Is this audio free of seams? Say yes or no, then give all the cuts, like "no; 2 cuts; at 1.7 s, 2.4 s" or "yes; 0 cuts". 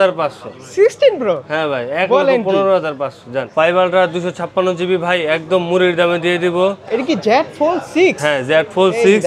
no; 2 cuts; at 3.4 s, 6.8 s